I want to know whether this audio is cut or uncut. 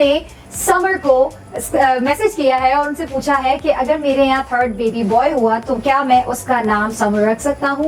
uncut